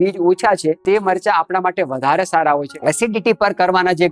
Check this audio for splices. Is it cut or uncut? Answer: cut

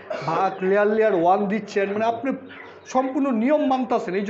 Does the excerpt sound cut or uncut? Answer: uncut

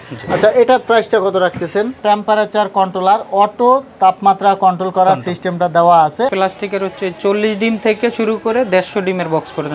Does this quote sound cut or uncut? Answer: cut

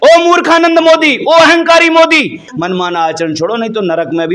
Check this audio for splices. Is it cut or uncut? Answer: cut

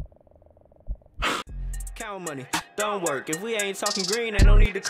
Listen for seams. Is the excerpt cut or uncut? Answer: cut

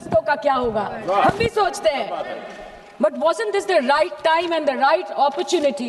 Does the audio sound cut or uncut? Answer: uncut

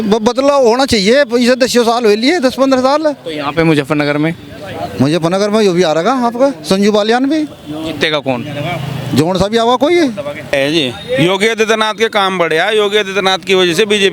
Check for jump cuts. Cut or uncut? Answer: cut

